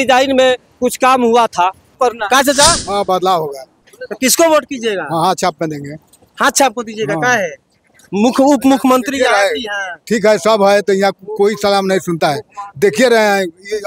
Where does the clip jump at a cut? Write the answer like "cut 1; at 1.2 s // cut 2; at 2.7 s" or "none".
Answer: cut 1; at 2.0 s